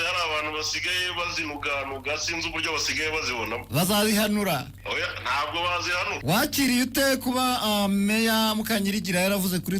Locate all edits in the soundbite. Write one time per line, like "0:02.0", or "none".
0:04.8
0:06.2